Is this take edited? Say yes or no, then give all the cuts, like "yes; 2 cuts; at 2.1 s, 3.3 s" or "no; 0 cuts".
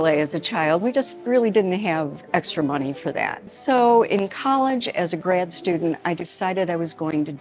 yes; 1 cut; at 3.6 s